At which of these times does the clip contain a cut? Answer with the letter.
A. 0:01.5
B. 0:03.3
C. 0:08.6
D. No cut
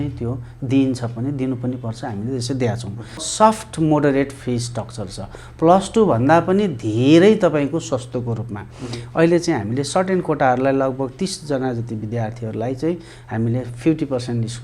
B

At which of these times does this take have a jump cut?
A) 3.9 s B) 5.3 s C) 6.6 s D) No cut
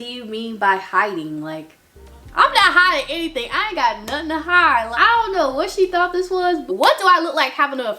C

